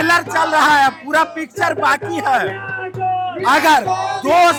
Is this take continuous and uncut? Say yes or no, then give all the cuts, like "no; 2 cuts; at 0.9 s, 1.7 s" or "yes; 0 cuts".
yes; 0 cuts